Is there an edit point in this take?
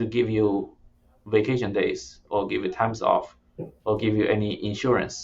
no; 0 cuts

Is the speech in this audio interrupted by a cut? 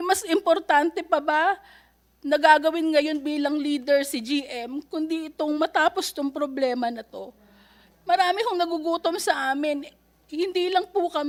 no; 0 cuts

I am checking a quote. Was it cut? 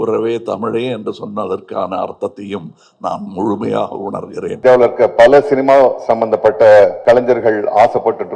yes; 2 cuts; at 4.5 s, 7.0 s

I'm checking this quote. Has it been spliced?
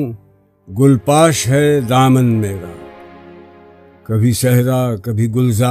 yes; 2 cuts; at 2.6 s, 4.0 s

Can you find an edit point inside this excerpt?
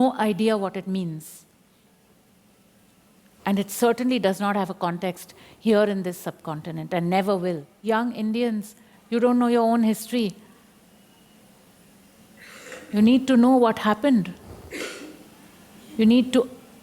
yes; 1 cut; at 7.8 s

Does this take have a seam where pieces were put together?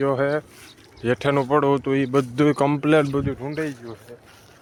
no; 0 cuts

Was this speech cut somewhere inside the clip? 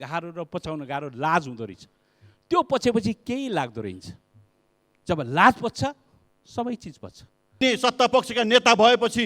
yes; 1 cut; at 7.6 s

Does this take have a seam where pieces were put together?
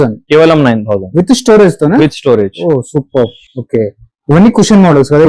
no; 0 cuts

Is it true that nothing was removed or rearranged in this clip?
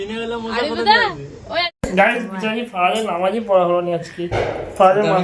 no; 1 cut; at 1.7 s

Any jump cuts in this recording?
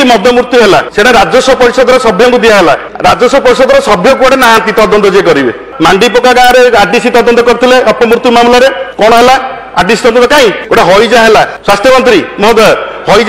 yes; 6 cuts; at 0.9 s, 2.9 s, 5.6 s, 8.8 s, 10.6 s, 11.6 s

